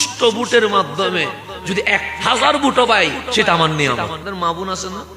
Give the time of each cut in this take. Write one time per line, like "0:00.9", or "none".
0:04.2